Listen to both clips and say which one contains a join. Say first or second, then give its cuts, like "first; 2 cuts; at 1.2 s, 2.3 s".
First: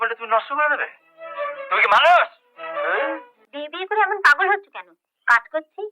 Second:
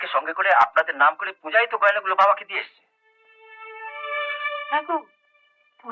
first; 1 cut; at 3.4 s